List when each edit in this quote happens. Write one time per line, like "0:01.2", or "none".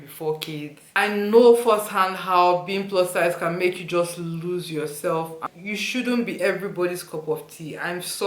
0:01.0
0:05.4